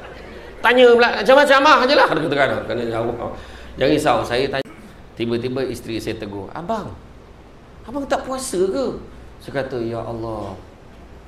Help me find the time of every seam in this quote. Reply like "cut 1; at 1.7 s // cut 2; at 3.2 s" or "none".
cut 1; at 4.6 s